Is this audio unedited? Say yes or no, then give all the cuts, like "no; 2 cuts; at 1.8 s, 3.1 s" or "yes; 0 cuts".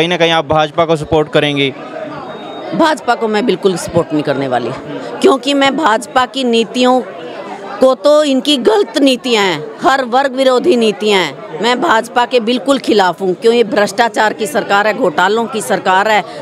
yes; 0 cuts